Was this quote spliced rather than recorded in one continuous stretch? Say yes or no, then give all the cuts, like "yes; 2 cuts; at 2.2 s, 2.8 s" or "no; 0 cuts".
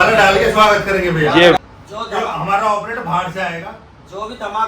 yes; 1 cut; at 1.6 s